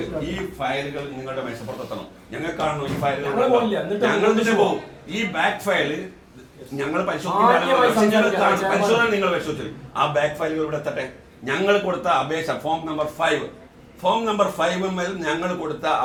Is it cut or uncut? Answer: uncut